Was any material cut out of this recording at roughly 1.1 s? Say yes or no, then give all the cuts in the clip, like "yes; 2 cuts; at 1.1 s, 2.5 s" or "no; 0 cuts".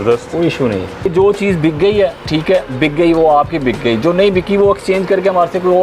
yes; 2 cuts; at 1.1 s, 2.3 s